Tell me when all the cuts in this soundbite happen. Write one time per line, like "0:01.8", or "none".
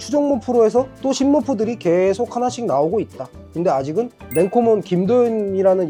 none